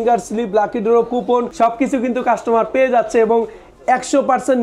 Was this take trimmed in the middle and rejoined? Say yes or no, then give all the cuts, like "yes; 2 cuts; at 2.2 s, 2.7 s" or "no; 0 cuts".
yes; 1 cut; at 1.5 s